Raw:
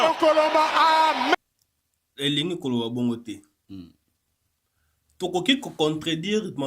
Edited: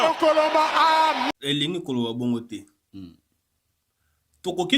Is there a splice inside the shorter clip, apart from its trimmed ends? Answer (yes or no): yes